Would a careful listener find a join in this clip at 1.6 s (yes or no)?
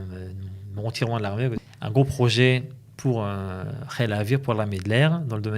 yes